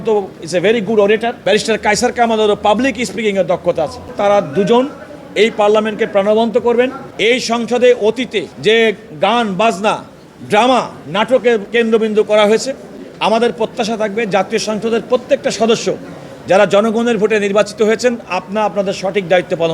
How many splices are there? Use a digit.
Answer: 5